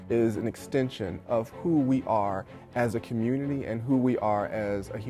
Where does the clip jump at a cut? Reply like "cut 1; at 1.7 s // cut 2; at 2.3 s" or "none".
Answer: none